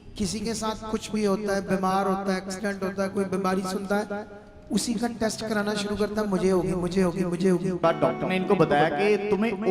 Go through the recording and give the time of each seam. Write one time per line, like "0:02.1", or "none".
0:07.8